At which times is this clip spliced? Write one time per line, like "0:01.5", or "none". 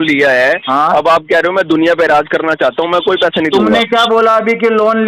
none